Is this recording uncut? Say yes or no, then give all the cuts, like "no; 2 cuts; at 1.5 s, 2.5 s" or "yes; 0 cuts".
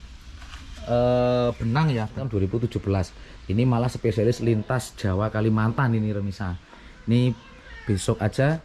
no; 1 cut; at 2.3 s